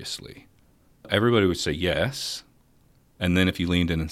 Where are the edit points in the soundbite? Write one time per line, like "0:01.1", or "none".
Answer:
0:01.1

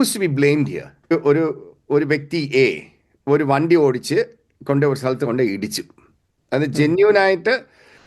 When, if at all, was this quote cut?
0:01.1

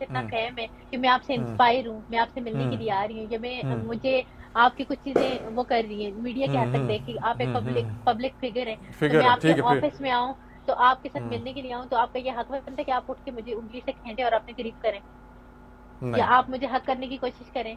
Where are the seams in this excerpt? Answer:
none

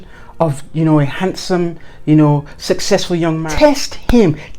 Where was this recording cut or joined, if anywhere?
0:03.4

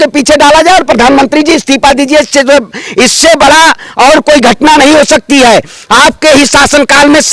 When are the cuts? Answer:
none

